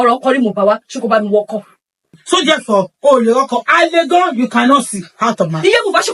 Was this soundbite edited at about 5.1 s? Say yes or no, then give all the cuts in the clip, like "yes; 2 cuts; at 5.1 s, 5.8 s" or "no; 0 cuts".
no; 1 cut; at 2.2 s